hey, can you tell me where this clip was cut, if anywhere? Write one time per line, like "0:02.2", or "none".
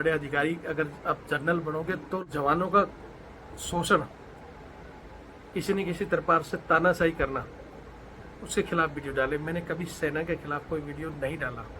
0:02.2